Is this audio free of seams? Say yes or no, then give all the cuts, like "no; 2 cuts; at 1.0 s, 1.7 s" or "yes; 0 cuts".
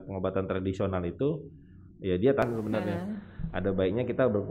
no; 1 cut; at 2.4 s